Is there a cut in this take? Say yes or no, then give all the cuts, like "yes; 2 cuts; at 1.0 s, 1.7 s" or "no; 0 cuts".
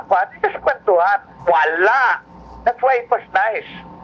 yes; 1 cut; at 1.4 s